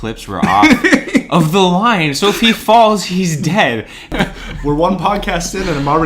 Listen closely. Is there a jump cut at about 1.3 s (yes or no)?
no